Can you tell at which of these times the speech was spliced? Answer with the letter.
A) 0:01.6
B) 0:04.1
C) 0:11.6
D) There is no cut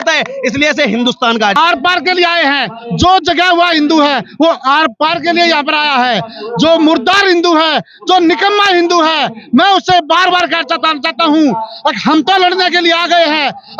A